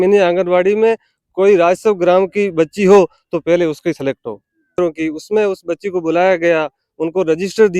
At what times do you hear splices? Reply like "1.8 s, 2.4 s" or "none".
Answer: 4.8 s